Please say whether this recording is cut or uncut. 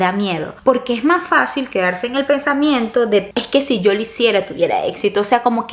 uncut